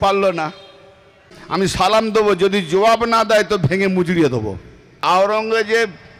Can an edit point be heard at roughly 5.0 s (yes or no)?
yes